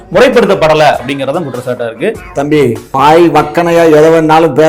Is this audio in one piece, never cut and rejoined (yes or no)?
no